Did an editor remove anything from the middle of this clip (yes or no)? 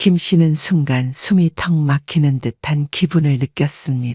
no